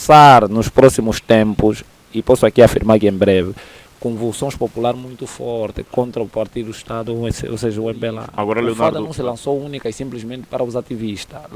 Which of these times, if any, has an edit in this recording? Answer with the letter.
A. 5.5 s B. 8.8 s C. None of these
B